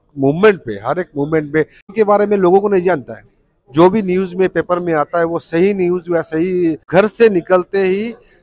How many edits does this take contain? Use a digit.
2